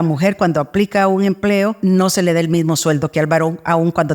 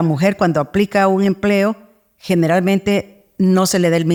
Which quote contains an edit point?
first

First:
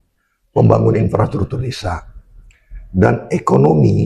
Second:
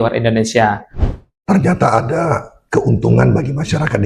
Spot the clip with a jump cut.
second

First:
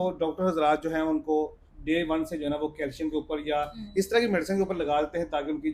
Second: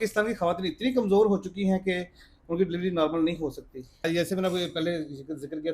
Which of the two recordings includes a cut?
second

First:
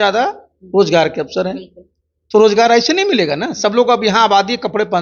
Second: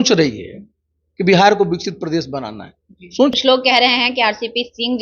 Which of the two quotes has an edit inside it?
second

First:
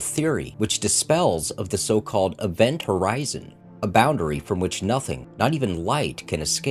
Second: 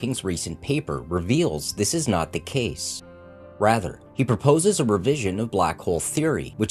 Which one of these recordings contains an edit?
second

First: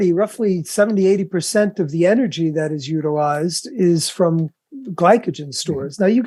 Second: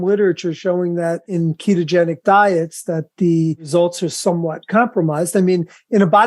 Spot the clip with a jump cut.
second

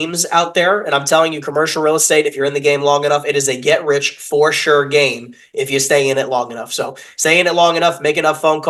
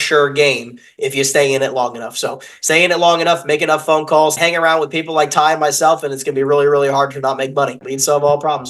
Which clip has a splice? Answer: second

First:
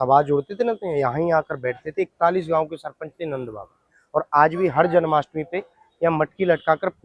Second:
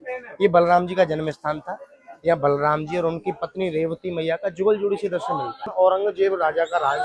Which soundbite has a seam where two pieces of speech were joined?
second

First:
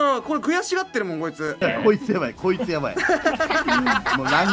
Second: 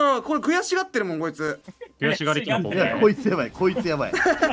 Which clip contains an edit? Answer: first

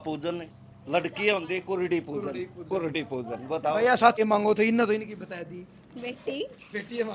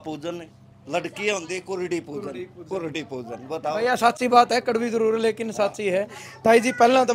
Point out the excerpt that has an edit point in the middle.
first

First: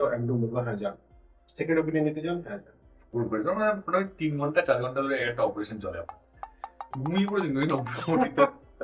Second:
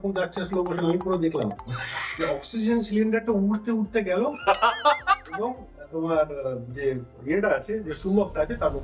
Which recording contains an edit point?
first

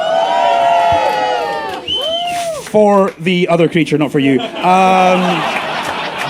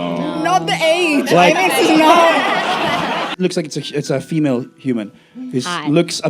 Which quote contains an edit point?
second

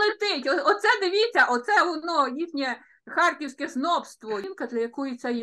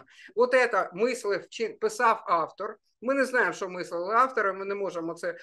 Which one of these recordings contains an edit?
first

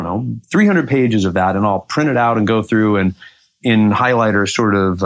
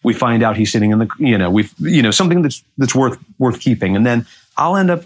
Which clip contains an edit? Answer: first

